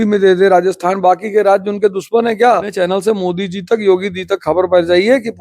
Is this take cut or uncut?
cut